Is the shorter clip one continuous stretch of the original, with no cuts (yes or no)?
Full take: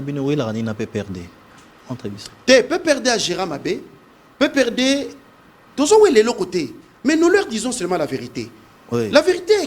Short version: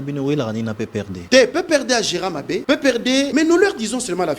no